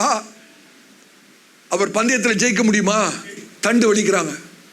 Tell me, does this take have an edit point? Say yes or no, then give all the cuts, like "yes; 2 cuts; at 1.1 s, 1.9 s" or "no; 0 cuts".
yes; 1 cut; at 3.5 s